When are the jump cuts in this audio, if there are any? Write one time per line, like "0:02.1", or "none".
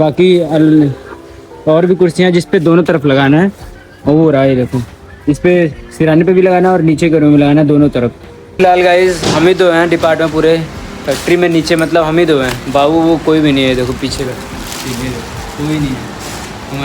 0:08.5